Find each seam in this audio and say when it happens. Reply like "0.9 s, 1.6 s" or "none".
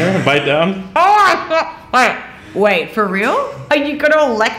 3.6 s